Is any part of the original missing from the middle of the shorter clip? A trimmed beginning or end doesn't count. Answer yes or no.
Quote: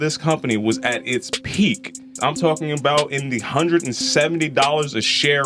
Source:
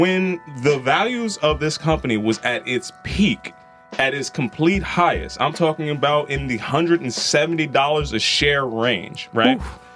yes